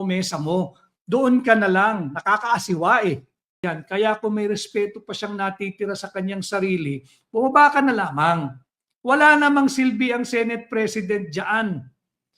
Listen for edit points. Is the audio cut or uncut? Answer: cut